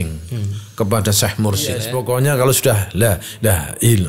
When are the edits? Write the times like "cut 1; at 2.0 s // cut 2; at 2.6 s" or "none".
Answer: cut 1; at 1.9 s